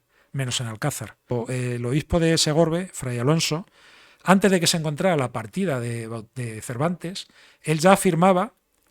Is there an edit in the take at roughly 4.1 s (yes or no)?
no